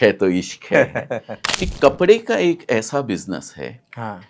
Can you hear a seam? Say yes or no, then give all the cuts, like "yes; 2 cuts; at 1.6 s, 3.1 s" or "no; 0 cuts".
yes; 1 cut; at 1.4 s